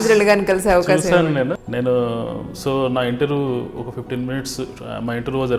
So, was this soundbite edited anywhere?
yes; 1 cut; at 1.6 s

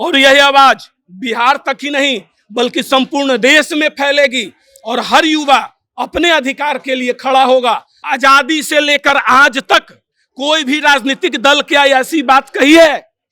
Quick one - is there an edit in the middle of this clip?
yes; 1 cut; at 7.9 s

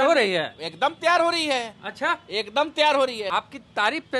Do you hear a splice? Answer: yes; 1 cut; at 3.2 s

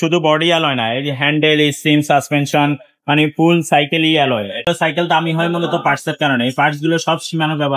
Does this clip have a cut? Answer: yes; 1 cut; at 4.6 s

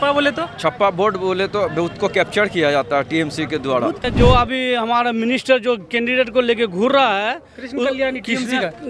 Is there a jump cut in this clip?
yes; 1 cut; at 4.0 s

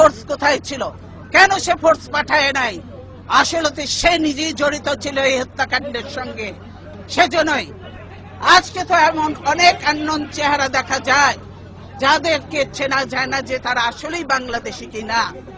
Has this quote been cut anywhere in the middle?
no; 0 cuts

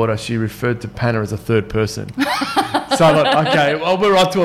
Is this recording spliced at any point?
no; 0 cuts

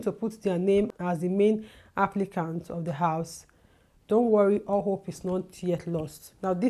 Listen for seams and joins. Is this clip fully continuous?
no; 1 cut; at 0.9 s

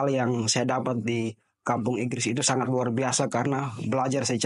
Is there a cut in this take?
no; 0 cuts

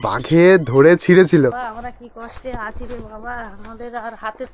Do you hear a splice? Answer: yes; 1 cut; at 1.5 s

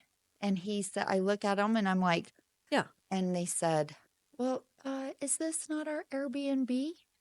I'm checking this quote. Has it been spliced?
yes; 1 cut; at 2.5 s

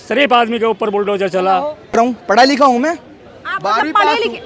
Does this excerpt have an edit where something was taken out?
yes; 1 cut; at 1.9 s

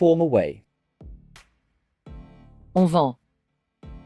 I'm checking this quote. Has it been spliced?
yes; 1 cut; at 3.2 s

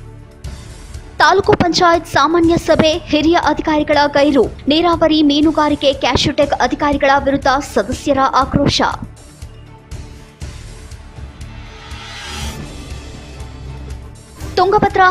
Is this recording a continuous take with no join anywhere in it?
yes; 0 cuts

